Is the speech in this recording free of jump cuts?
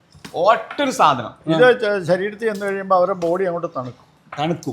no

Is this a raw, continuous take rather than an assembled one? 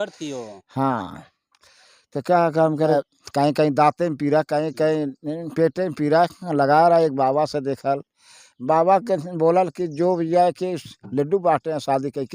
no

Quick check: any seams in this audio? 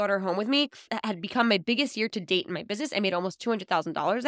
yes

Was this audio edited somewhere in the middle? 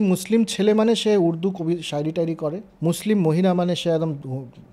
yes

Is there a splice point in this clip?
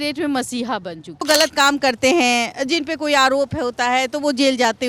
yes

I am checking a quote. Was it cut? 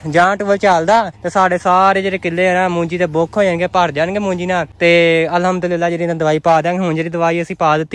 yes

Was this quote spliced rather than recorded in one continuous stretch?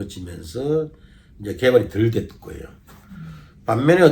no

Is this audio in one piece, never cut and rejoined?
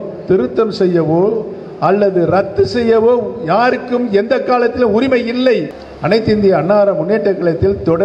no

